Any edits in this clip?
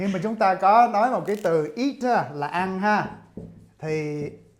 no; 0 cuts

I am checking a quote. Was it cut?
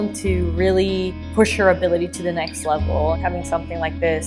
yes; 2 cuts; at 1.2 s, 3.1 s

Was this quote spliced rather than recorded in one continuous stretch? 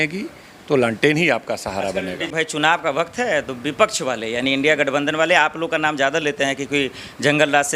yes; 1 cut; at 2.3 s

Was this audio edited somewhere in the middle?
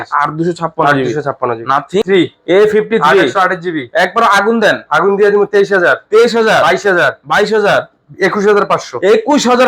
yes; 1 cut; at 2.0 s

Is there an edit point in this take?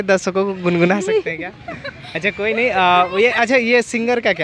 no; 0 cuts

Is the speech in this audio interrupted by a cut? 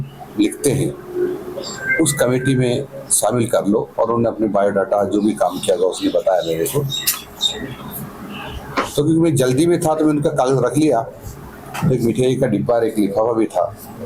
no; 0 cuts

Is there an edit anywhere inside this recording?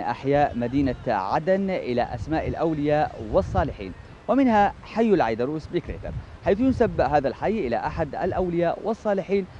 no; 0 cuts

